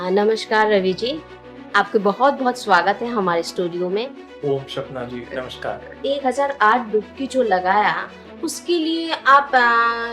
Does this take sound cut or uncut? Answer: cut